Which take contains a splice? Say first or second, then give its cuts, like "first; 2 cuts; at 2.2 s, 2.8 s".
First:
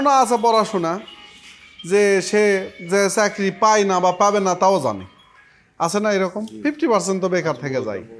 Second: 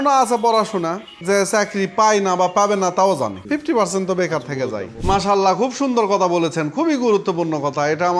second; 3 cuts; at 1.1 s, 3.4 s, 4.9 s